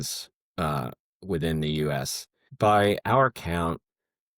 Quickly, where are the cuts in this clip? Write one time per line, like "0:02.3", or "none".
0:02.5